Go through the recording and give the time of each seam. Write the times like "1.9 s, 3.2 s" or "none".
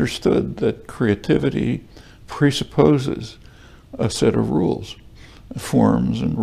none